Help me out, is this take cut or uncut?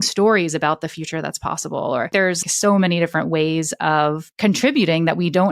cut